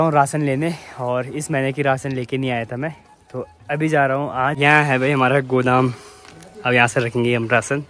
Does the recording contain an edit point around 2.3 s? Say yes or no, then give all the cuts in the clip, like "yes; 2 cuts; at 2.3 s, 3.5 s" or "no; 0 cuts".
no; 1 cut; at 4.6 s